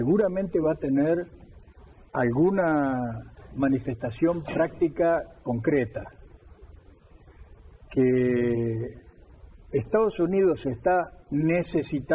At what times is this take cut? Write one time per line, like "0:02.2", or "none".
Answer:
0:08.2